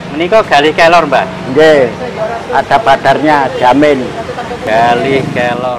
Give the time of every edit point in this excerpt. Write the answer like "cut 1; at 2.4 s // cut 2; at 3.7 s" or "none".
cut 1; at 4.6 s